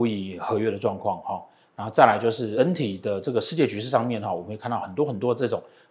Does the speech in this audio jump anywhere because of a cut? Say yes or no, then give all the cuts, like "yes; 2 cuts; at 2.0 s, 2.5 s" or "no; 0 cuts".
no; 0 cuts